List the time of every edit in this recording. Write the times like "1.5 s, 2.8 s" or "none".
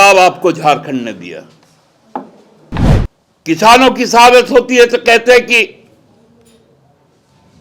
2.8 s